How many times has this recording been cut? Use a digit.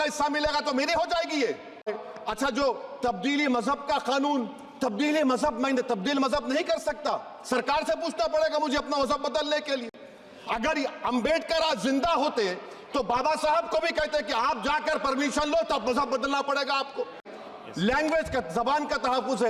2